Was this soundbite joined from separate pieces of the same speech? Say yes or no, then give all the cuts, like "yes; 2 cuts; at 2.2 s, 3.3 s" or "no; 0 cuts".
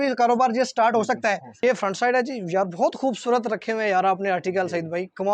yes; 1 cut; at 1.5 s